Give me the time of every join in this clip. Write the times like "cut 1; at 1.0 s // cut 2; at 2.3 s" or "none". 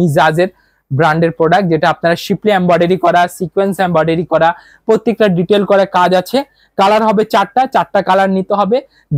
none